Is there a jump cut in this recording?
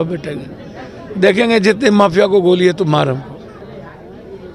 no; 0 cuts

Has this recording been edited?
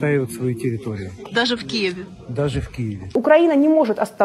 yes; 1 cut; at 3.1 s

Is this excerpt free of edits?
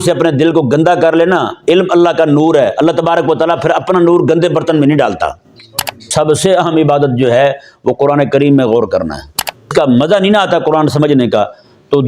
no; 2 cuts; at 6.0 s, 9.7 s

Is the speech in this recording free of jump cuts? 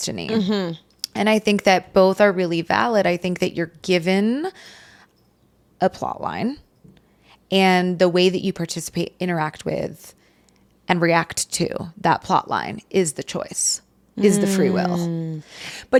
yes; 0 cuts

